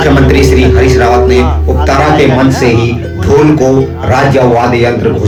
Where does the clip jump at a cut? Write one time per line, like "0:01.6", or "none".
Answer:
none